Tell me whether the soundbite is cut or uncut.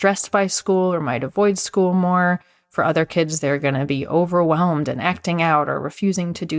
uncut